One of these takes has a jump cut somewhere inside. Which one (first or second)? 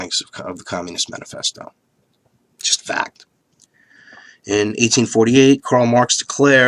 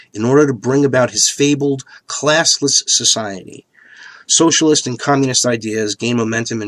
second